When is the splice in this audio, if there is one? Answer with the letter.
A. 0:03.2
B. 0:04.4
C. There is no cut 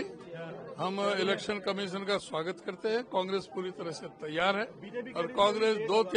C